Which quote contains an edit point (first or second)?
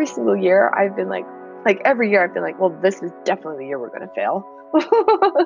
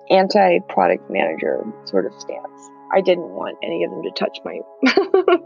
first